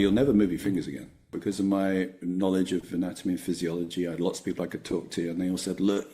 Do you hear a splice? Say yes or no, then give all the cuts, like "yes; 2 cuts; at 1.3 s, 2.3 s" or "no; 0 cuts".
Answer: yes; 1 cut; at 1.3 s